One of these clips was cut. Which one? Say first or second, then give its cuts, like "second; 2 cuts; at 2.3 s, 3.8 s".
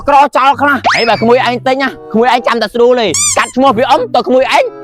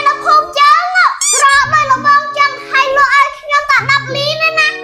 first; 3 cuts; at 0.9 s, 2.0 s, 3.2 s